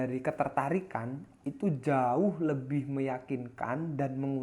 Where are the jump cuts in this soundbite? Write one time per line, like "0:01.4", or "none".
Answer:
none